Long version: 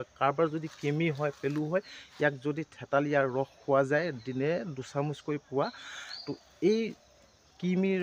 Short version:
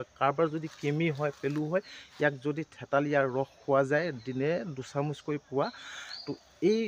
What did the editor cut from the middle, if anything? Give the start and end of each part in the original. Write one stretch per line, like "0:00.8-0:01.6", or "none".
none

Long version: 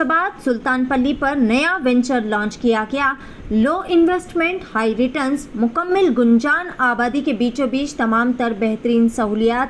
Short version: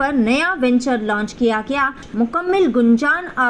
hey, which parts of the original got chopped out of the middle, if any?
0:03.3-0:05.5

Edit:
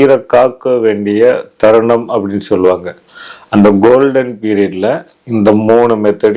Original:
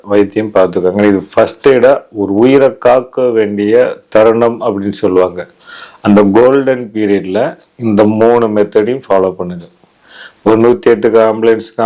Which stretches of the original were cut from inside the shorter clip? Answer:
none

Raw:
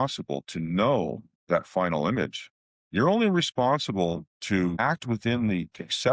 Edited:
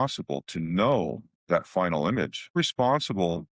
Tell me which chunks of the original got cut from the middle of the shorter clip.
0:02.6-0:03.3

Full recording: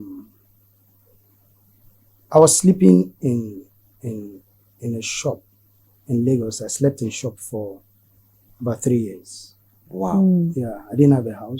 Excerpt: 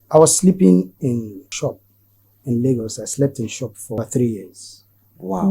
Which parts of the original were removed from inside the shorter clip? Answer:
0:03.7-0:05.1
0:07.6-0:08.7

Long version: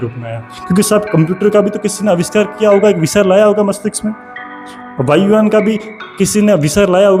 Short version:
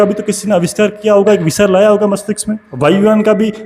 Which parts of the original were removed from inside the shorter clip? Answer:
0:04.2-0:04.9

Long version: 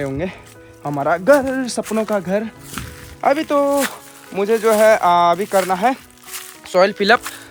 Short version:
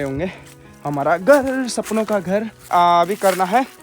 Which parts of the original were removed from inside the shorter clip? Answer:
0:02.7-0:05.0

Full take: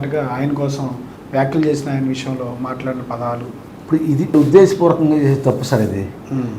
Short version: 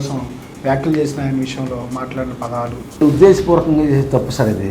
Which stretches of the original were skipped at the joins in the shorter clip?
0:03.6-0:04.3

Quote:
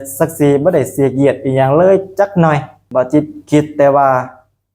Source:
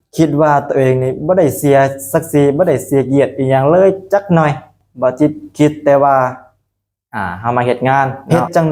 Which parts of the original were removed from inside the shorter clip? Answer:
0:04.7-0:04.8

